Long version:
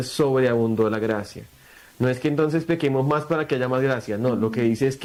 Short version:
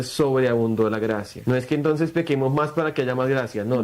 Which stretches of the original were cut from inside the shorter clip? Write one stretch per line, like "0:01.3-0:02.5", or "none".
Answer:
0:01.3-0:01.8